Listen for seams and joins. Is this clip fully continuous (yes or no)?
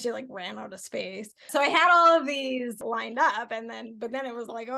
no